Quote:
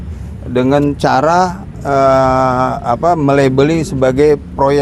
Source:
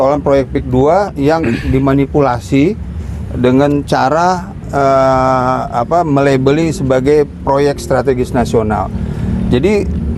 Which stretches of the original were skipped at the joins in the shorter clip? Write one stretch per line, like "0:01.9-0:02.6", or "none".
none